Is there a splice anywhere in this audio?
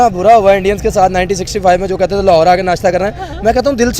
yes; 1 cut; at 2.9 s

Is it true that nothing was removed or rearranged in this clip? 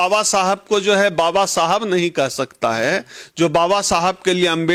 yes; 0 cuts

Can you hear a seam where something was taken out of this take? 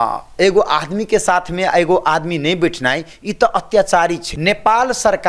yes; 1 cut; at 4.3 s

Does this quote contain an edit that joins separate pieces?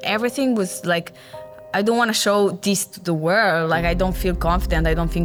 no; 0 cuts

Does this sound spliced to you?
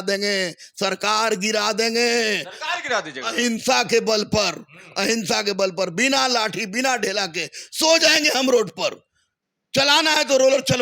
no; 0 cuts

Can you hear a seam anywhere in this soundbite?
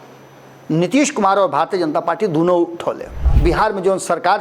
yes; 1 cut; at 3.3 s

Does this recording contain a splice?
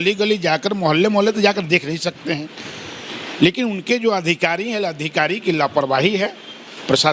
no; 0 cuts

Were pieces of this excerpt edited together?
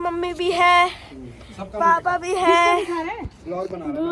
no; 0 cuts

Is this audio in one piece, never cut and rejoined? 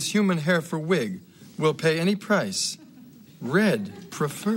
yes; 0 cuts

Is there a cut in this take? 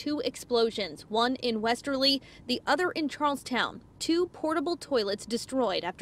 no; 0 cuts

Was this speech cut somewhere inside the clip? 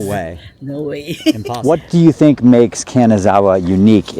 yes; 1 cut; at 1.5 s

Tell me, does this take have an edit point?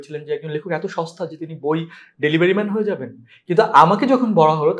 no; 0 cuts

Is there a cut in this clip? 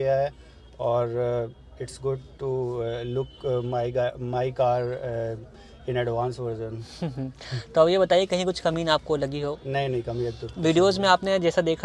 no; 0 cuts

